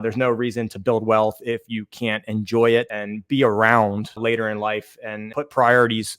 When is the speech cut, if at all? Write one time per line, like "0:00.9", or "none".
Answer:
0:02.9
0:04.2
0:05.2